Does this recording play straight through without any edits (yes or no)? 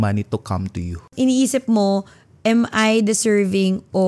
no